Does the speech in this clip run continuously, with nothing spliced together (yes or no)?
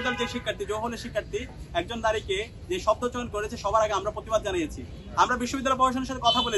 yes